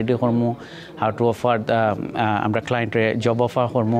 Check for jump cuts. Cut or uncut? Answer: uncut